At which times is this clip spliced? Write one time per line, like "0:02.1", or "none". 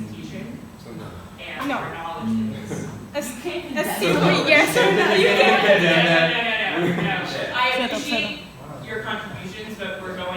0:07.4